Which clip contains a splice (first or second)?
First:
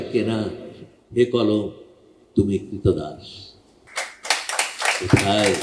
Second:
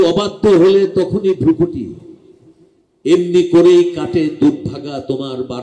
first